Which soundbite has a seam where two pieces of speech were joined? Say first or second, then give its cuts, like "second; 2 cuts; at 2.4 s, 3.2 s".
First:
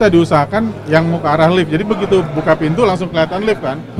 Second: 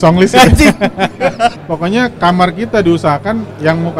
second; 1 cut; at 1.6 s